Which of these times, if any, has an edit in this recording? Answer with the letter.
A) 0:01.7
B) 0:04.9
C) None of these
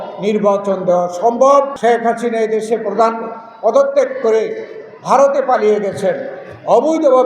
A